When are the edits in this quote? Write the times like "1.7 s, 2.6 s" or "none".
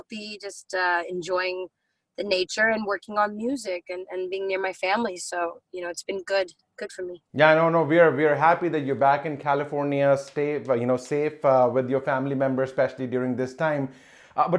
none